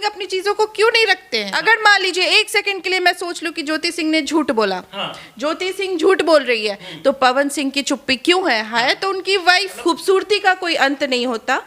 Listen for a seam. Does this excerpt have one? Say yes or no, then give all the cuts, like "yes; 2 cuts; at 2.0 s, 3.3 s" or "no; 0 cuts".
yes; 2 cuts; at 1.5 s, 9.7 s